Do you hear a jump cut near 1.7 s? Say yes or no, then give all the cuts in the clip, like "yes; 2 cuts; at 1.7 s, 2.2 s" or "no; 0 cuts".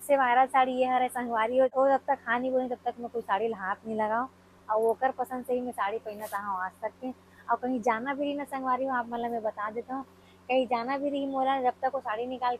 yes; 1 cut; at 1.7 s